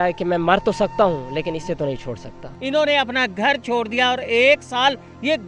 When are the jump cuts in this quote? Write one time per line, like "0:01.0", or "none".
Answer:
0:02.5